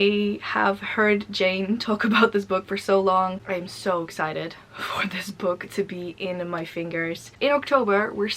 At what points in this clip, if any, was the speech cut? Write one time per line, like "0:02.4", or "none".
0:03.4
0:07.4

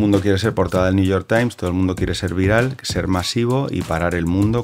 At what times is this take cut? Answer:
none

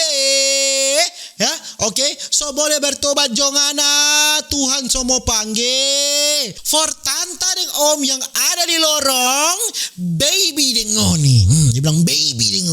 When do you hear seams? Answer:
0:06.6

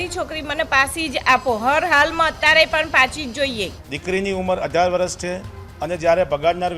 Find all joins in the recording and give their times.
0:03.8

